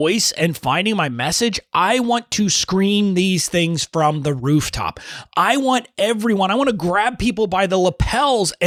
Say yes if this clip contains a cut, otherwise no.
no